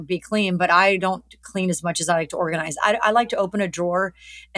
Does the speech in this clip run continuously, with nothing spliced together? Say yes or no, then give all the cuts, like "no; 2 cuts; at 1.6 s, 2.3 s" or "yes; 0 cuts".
yes; 0 cuts